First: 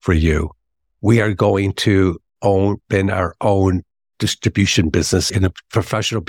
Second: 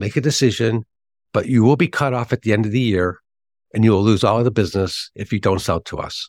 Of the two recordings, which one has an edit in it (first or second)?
first